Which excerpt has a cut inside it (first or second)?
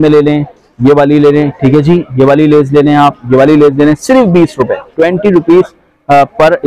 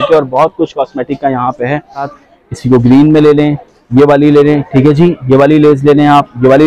second